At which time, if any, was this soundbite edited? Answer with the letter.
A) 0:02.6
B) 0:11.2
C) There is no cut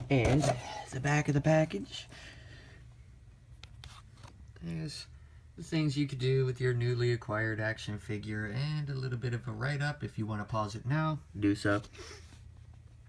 A